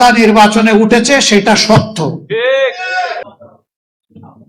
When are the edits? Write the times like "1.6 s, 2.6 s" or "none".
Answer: 3.2 s